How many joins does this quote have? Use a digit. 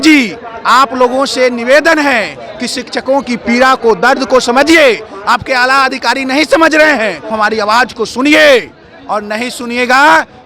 1